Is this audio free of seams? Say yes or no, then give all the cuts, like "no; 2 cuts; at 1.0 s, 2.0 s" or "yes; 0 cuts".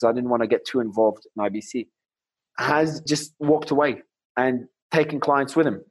no; 1 cut; at 4.7 s